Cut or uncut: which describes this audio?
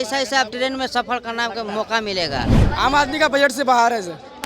cut